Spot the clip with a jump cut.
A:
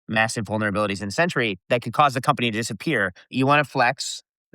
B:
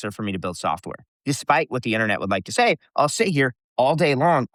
A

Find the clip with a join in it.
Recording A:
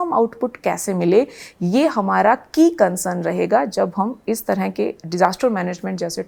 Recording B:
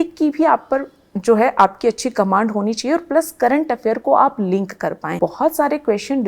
B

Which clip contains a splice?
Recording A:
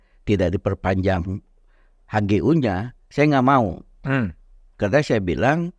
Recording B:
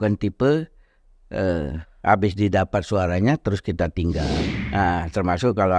B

